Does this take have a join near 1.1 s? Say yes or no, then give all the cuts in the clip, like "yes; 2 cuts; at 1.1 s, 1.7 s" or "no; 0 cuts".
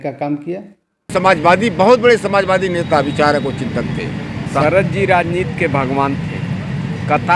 yes; 2 cuts; at 1.1 s, 4.6 s